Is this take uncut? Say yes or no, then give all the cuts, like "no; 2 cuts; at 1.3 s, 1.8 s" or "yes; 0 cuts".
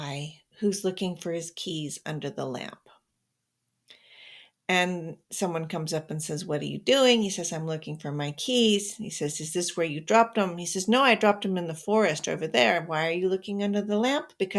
yes; 0 cuts